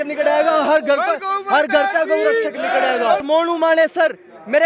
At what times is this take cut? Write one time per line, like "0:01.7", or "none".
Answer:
0:03.2